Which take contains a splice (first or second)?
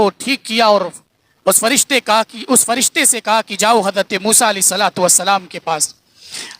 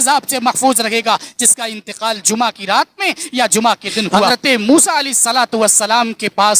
second